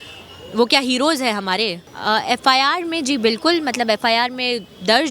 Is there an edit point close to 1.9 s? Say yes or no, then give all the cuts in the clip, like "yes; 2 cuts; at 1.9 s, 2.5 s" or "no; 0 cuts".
yes; 1 cut; at 1.9 s